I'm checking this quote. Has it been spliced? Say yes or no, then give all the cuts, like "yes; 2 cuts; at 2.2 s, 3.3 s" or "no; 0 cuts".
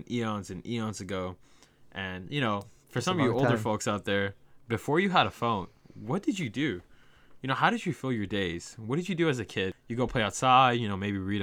yes; 1 cut; at 9.8 s